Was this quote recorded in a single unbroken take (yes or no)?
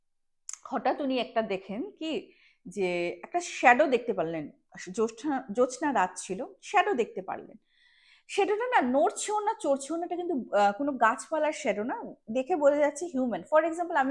yes